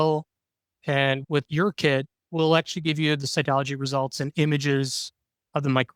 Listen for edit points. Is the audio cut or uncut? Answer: cut